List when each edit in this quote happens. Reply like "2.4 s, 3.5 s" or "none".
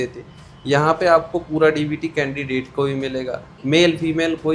3.5 s